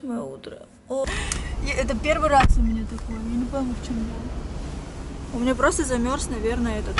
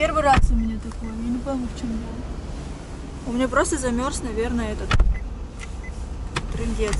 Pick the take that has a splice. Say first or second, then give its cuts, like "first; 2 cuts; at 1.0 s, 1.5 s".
first; 1 cut; at 1.1 s